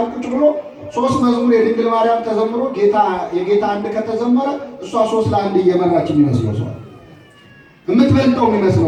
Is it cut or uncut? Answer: uncut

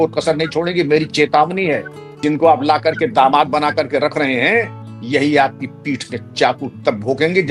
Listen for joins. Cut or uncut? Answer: cut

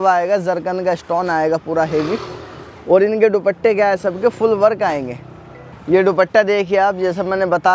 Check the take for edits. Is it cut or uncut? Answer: uncut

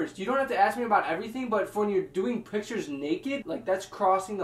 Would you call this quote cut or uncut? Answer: cut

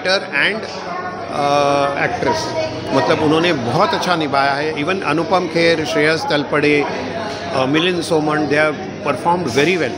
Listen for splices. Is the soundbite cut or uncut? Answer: uncut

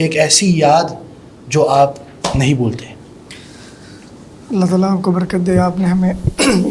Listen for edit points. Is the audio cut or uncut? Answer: uncut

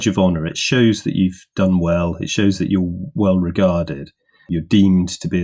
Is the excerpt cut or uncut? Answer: cut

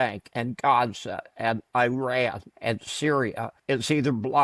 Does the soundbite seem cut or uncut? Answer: cut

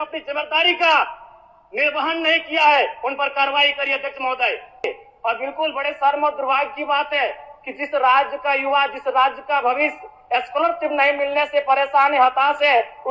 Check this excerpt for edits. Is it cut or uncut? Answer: cut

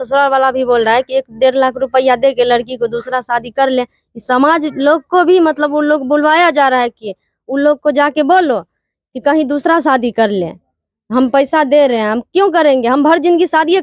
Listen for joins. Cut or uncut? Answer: uncut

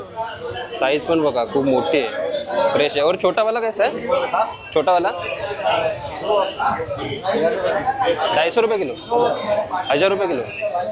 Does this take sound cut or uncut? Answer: uncut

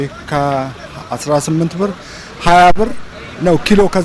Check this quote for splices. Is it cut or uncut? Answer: uncut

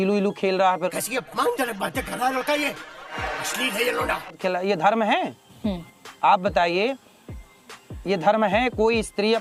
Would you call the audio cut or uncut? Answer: uncut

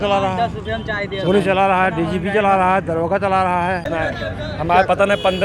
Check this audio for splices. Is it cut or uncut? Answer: cut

